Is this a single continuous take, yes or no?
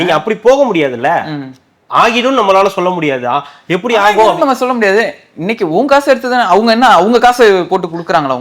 yes